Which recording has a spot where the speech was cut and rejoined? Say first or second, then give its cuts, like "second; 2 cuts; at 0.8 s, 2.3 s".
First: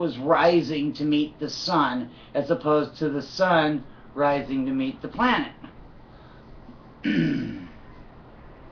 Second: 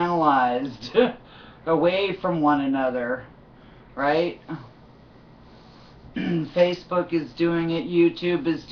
second; 1 cut; at 4.3 s